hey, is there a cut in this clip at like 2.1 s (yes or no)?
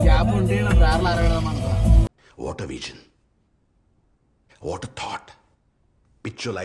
yes